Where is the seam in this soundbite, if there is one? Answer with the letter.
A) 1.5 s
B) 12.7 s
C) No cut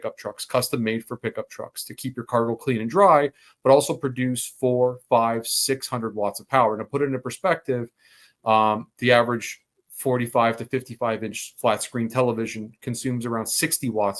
C